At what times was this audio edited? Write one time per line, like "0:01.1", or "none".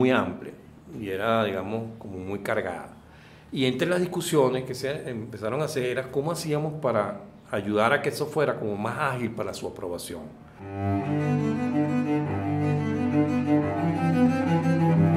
0:10.5